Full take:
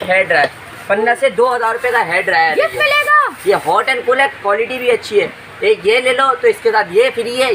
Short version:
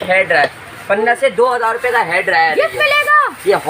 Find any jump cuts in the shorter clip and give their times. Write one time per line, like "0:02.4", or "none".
none